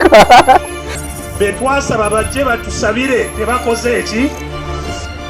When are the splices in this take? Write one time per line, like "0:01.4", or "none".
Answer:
none